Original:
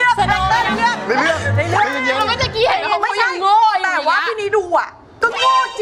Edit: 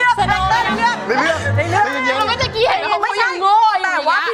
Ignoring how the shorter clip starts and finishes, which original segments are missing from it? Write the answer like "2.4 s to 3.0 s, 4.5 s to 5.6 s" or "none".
none